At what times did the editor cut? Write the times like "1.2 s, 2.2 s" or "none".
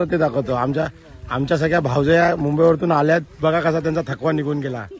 none